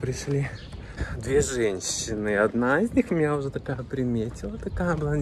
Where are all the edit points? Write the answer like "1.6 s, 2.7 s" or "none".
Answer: 1.1 s